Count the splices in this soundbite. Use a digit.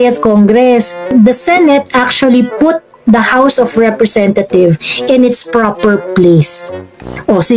1